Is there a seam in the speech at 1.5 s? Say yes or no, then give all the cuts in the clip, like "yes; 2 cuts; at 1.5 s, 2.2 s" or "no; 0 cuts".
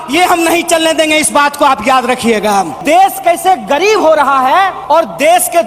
no; 2 cuts; at 2.8 s, 4.8 s